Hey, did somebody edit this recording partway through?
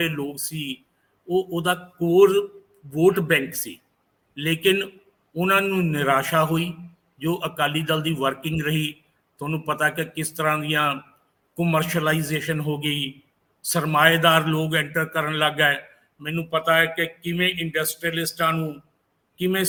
no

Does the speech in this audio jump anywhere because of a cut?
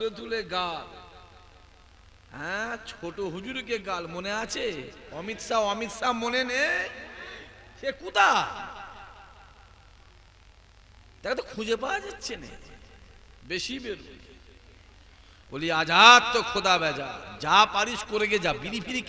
no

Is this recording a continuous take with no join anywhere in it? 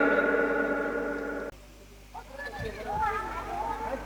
yes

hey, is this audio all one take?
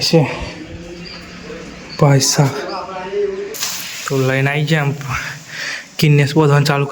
no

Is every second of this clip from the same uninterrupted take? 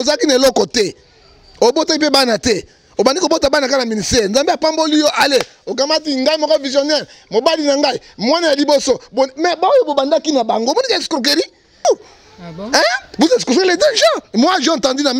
no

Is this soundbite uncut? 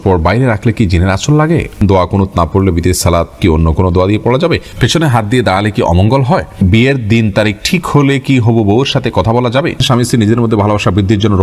no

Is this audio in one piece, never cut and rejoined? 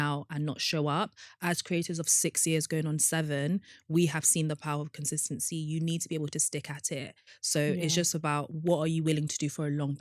no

